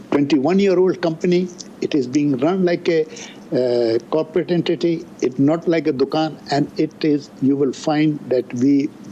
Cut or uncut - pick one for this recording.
uncut